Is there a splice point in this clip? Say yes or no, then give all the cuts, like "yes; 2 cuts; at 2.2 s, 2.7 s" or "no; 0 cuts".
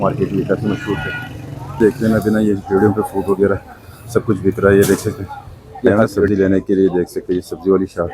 yes; 2 cuts; at 1.6 s, 6.3 s